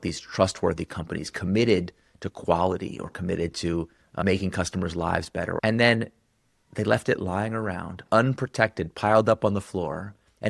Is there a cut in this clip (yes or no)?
yes